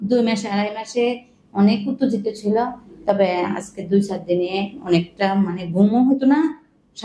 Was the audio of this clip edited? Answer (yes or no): no